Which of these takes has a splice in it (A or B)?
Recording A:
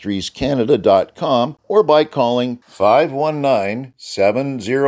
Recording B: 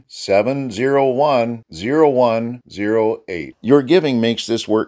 A